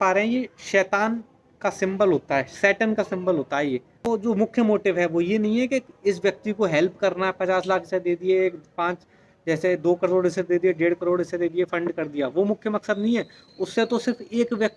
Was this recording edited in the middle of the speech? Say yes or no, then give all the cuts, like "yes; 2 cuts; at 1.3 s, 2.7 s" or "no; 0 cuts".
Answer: yes; 1 cut; at 4.1 s